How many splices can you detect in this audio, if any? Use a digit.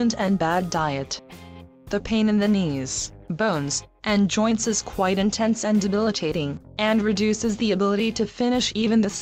0